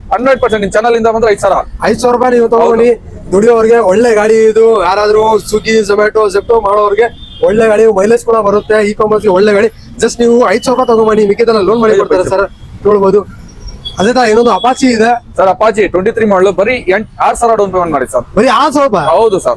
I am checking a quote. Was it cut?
no; 0 cuts

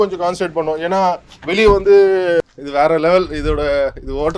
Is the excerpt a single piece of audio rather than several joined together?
no; 1 cut; at 2.4 s

